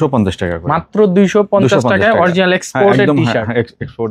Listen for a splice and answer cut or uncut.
uncut